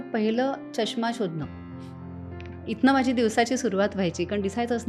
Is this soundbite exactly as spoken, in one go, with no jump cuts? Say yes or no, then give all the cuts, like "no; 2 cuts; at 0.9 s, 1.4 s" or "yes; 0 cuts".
yes; 0 cuts